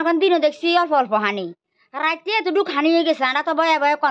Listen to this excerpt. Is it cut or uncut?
uncut